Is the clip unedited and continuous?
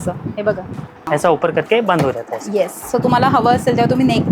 no; 1 cut; at 1.1 s

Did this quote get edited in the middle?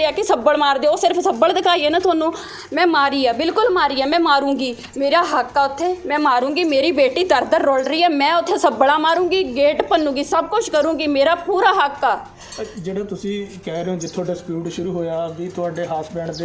no; 0 cuts

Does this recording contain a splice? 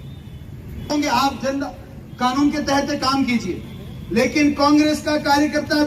yes; 1 cut; at 0.9 s

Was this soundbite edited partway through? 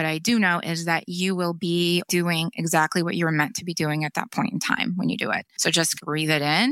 yes; 2 cuts; at 2.1 s, 5.5 s

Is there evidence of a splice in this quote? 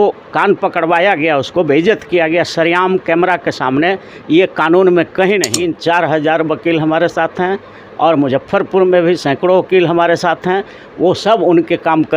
yes; 1 cut; at 5.7 s

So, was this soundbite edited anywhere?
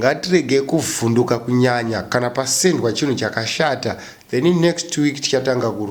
yes; 1 cut; at 4.1 s

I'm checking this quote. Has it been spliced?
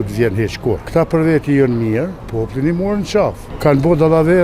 yes; 3 cuts; at 0.8 s, 2.2 s, 3.5 s

